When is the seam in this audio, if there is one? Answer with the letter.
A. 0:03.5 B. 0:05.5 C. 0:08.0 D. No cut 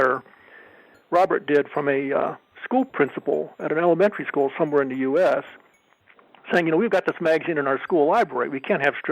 D